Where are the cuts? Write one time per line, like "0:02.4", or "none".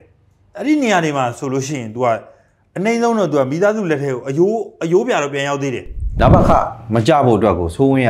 0:06.1